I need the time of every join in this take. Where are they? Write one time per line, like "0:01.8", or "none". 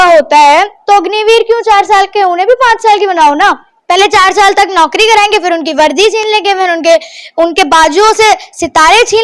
0:03.7